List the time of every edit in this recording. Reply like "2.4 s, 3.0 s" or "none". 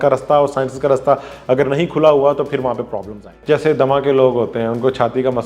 3.3 s